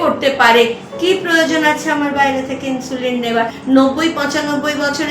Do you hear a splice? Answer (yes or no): yes